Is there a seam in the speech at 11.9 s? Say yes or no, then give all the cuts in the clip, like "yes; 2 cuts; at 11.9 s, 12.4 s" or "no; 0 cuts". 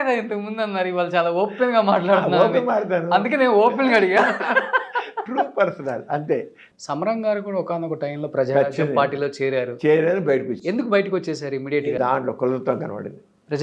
yes; 2 cuts; at 6.6 s, 11.9 s